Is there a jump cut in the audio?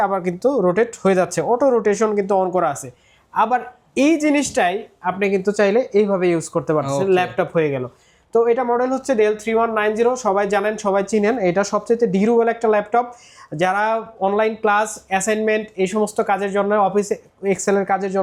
no; 0 cuts

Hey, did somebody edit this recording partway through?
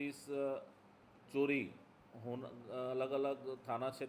no; 0 cuts

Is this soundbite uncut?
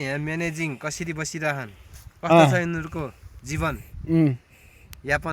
yes; 0 cuts

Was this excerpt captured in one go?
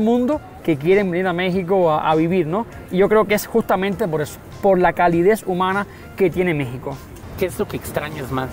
yes; 0 cuts

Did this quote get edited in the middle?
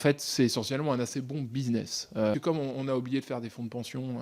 yes; 1 cut; at 2.4 s

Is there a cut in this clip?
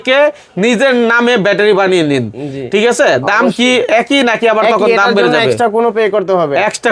no; 0 cuts

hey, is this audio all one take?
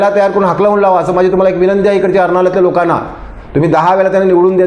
yes; 0 cuts

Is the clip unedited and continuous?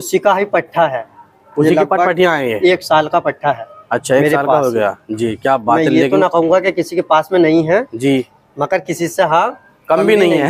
yes; 0 cuts

